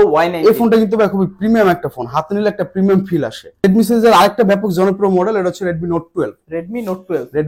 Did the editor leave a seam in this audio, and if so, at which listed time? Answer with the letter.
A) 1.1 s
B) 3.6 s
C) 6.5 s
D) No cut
B